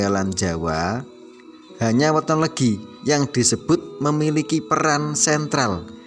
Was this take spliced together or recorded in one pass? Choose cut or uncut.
uncut